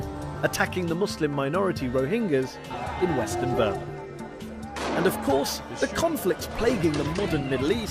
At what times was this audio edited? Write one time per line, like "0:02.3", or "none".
0:05.7